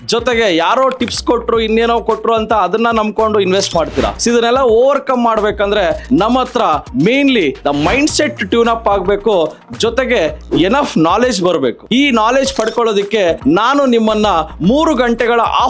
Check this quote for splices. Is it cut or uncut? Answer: uncut